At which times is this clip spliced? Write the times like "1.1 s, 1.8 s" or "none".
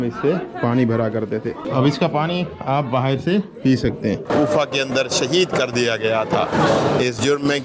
1.6 s, 4.3 s